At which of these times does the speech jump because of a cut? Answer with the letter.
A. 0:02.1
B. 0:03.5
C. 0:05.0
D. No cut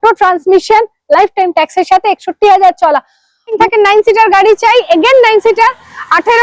B